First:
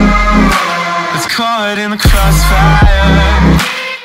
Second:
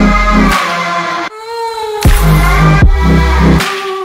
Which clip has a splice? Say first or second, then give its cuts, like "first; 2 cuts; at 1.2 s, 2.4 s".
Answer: first; 1 cut; at 1.1 s